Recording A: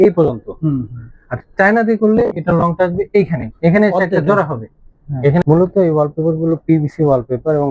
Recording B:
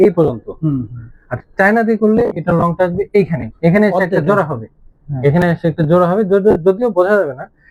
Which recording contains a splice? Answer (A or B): A